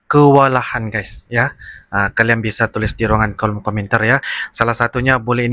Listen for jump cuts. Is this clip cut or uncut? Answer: uncut